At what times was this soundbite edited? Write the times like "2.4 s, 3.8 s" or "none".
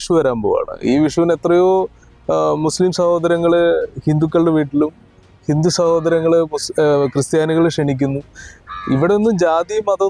none